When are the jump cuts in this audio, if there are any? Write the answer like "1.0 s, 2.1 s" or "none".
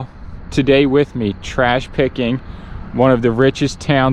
none